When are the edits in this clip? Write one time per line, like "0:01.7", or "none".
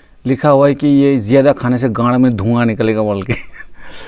none